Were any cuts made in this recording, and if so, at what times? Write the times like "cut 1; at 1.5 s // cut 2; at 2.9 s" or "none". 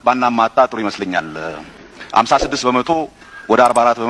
none